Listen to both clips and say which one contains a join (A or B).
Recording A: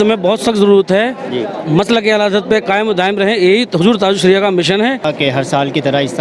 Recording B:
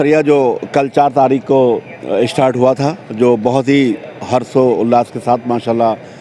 A